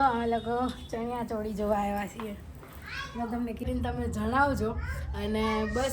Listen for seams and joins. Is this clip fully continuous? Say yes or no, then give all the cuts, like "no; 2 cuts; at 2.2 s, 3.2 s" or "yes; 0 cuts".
no; 1 cut; at 3.7 s